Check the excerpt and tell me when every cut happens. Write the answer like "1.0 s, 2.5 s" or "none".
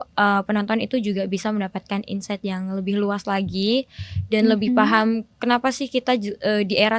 none